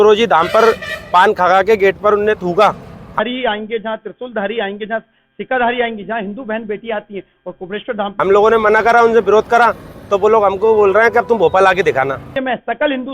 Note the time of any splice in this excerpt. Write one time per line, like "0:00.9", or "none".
0:03.1
0:08.1
0:12.3